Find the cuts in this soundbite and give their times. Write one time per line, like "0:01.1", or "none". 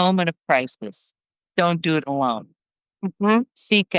none